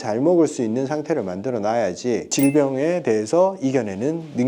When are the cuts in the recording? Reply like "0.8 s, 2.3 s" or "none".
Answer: 2.3 s